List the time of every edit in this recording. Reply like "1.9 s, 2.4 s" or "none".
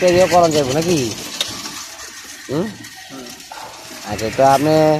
none